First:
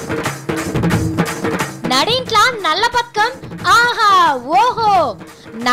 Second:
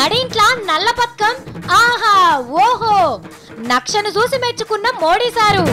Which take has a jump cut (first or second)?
first